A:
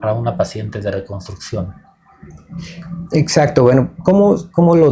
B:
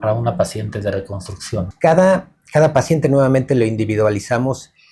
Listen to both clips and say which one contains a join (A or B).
B